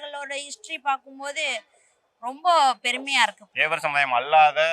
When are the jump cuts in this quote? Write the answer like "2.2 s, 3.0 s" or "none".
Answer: 3.5 s